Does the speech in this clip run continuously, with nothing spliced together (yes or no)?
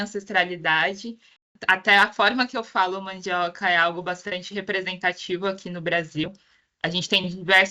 no